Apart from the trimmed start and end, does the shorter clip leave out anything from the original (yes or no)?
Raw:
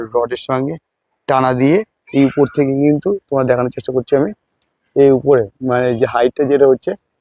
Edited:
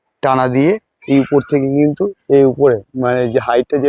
yes